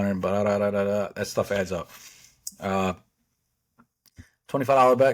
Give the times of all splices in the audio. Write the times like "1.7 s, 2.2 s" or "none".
none